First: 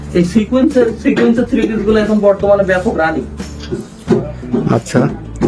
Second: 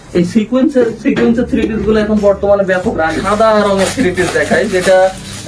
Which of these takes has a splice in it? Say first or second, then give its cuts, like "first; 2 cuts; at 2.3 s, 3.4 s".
second; 1 cut; at 3.2 s